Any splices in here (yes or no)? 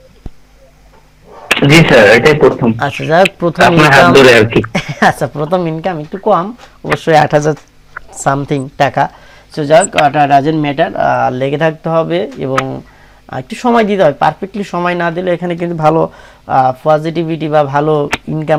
no